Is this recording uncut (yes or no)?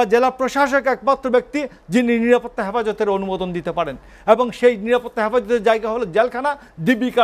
yes